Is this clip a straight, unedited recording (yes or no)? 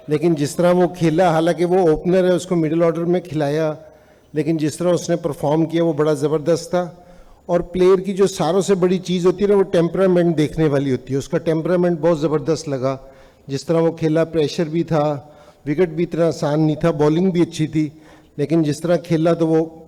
yes